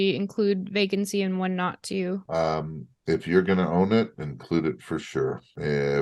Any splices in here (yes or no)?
no